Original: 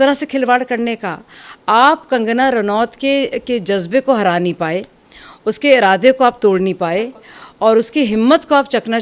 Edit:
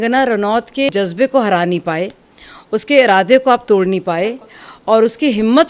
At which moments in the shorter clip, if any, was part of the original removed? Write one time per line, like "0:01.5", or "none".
0:00.9